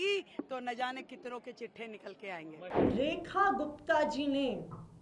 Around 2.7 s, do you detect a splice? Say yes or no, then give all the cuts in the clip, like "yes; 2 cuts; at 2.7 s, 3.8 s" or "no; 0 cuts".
yes; 1 cut; at 2.7 s